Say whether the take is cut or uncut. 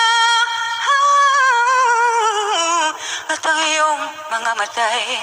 uncut